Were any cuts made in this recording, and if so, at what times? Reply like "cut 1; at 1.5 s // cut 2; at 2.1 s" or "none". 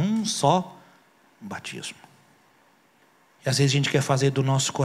cut 1; at 3.1 s